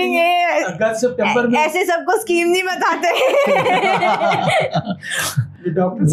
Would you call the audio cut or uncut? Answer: uncut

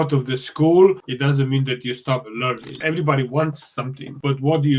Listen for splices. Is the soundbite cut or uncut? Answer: cut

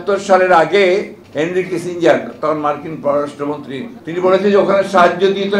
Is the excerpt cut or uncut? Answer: cut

